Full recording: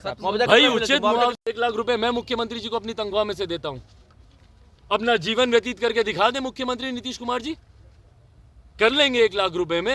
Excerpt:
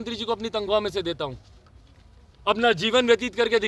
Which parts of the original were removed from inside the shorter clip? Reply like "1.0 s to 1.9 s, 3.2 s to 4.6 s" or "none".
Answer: none